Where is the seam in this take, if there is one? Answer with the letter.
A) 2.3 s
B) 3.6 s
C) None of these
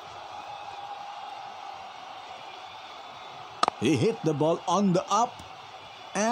B